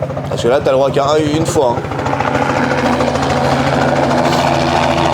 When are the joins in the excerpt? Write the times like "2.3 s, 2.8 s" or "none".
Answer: none